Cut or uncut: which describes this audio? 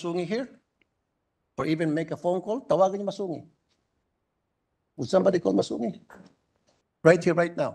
uncut